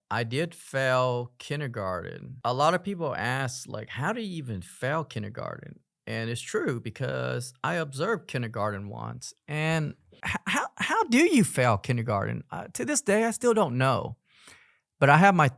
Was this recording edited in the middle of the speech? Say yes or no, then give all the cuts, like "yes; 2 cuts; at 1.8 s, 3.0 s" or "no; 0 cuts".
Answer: yes; 2 cuts; at 2.3 s, 10.2 s